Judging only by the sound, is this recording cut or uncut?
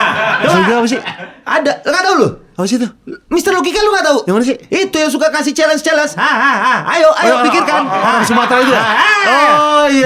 uncut